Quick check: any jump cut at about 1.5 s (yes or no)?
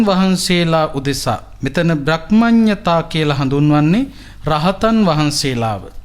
yes